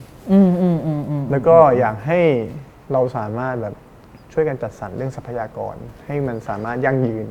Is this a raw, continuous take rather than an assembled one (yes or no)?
yes